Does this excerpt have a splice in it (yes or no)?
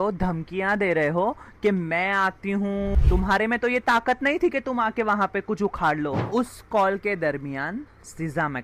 yes